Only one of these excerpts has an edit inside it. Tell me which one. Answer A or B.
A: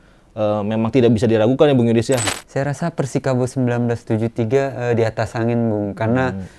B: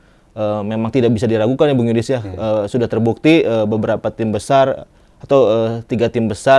A